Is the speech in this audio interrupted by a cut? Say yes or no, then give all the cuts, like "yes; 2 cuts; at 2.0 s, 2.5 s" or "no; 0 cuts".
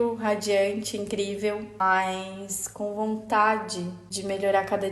yes; 1 cut; at 1.7 s